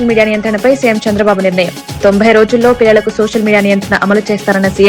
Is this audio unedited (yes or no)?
yes